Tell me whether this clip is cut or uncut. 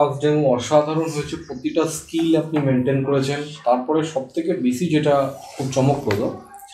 uncut